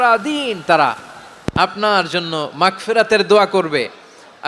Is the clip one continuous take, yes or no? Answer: yes